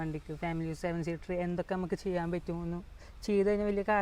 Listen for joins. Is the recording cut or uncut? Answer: uncut